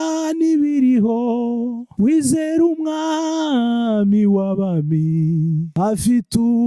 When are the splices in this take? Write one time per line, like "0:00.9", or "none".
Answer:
0:01.8
0:05.7